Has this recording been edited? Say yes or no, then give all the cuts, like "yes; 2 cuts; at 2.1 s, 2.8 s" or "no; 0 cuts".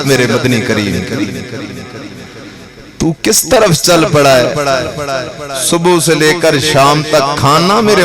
no; 0 cuts